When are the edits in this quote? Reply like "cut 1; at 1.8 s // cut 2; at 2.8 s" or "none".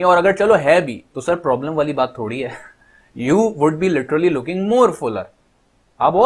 cut 1; at 1.0 s